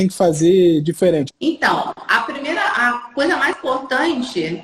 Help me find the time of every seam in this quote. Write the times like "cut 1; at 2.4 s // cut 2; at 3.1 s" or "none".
cut 1; at 1.2 s